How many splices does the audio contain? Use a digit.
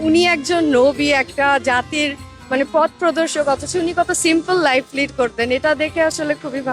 0